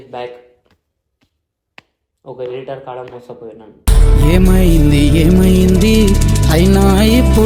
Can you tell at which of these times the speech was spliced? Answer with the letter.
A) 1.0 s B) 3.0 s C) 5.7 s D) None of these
D